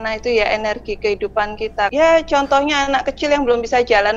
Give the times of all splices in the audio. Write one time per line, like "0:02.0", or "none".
0:01.9